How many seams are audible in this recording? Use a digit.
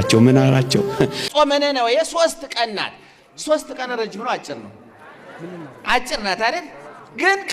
1